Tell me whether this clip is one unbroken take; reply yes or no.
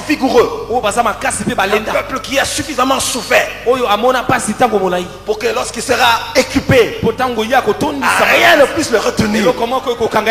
yes